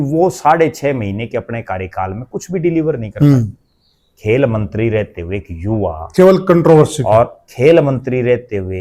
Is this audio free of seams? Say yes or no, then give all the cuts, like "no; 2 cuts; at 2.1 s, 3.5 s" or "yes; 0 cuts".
yes; 0 cuts